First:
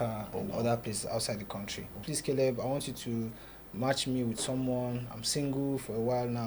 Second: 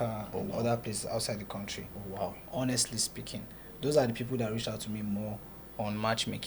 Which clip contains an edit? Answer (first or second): first